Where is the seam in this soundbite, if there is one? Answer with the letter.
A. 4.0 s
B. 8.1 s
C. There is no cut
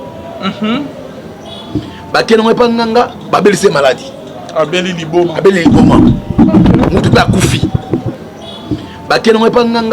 B